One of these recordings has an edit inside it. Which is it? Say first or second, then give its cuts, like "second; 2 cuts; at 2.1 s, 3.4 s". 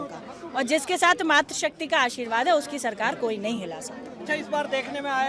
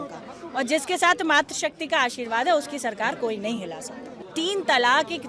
second; 1 cut; at 4.1 s